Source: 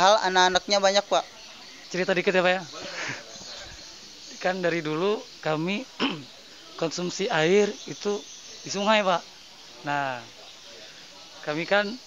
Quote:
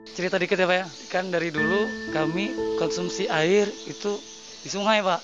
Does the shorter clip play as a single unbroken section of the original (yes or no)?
no